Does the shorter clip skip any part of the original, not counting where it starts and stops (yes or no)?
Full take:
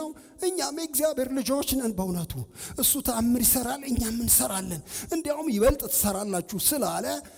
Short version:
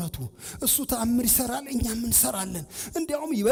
no